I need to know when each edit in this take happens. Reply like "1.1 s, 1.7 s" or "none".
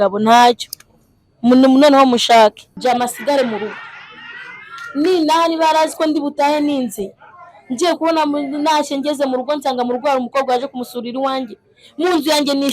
2.7 s